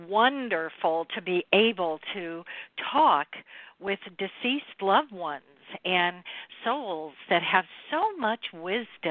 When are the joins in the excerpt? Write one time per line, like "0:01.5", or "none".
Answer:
none